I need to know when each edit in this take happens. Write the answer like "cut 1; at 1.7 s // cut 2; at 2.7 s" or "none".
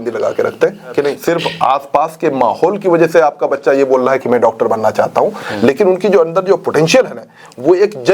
cut 1; at 1.2 s

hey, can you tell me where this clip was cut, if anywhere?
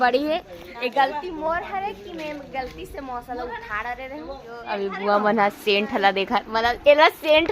cut 1; at 4.5 s

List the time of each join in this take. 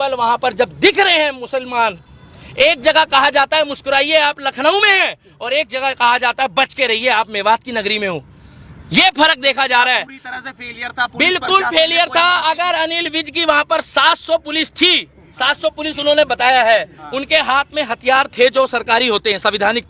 none

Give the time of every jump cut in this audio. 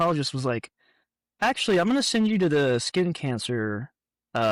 none

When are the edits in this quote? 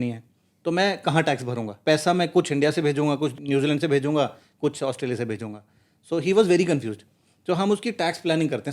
cut 1; at 1.8 s // cut 2; at 3.4 s

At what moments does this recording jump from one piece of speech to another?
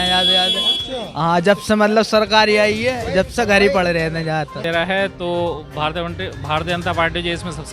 cut 1; at 4.6 s

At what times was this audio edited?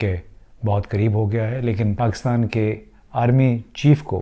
cut 1; at 1.9 s

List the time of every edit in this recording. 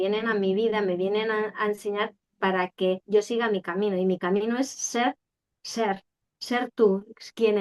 none

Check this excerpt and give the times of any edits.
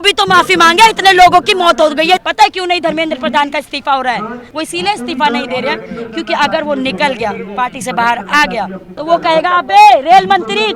cut 1; at 2.2 s // cut 2; at 4.4 s // cut 3; at 8.9 s

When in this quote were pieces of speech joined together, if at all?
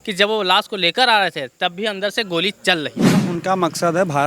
cut 1; at 3.1 s

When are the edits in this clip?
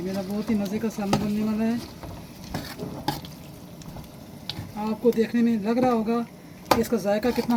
none

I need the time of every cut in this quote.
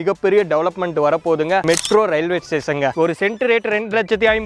cut 1; at 1.6 s // cut 2; at 2.9 s

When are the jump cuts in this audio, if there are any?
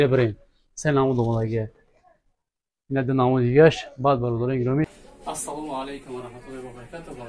cut 1; at 5.0 s

